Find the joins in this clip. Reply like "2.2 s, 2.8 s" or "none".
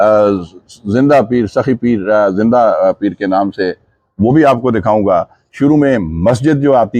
none